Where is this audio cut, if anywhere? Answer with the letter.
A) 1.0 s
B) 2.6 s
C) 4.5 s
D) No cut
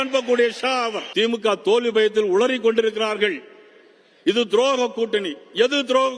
A